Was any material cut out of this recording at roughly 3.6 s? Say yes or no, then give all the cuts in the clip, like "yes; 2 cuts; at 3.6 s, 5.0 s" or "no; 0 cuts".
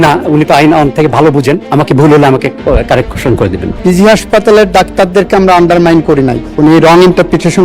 yes; 3 cuts; at 1.6 s, 3.6 s, 6.4 s